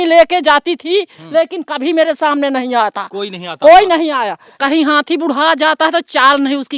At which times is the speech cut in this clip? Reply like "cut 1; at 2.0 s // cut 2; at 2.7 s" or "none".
cut 1; at 4.5 s